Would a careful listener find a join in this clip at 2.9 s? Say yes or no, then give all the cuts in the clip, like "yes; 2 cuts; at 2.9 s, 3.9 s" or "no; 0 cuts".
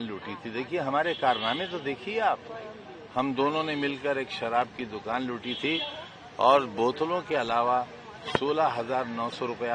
no; 0 cuts